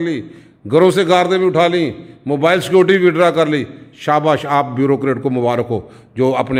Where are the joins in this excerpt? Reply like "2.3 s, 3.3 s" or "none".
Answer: none